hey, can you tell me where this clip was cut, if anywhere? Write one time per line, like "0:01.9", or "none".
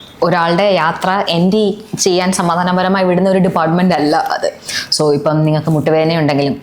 none